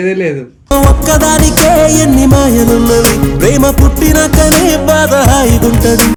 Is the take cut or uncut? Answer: uncut